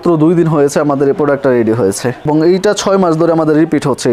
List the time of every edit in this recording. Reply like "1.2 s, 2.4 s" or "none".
2.2 s